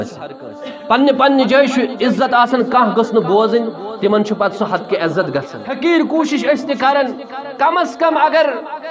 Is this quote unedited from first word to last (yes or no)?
no